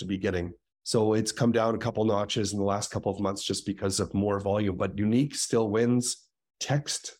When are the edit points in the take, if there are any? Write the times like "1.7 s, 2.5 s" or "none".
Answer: none